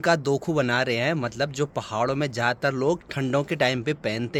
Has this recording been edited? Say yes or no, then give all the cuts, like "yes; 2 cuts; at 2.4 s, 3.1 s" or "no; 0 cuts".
no; 0 cuts